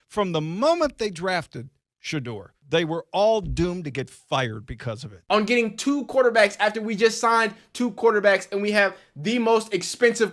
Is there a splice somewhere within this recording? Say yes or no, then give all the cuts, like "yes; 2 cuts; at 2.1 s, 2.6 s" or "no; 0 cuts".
yes; 2 cuts; at 2.5 s, 5.1 s